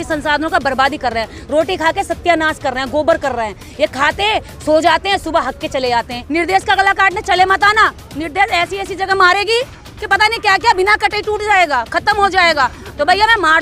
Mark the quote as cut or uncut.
cut